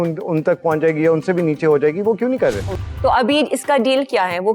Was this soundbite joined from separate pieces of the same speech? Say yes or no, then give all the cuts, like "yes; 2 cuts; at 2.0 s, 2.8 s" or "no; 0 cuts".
yes; 1 cut; at 2.7 s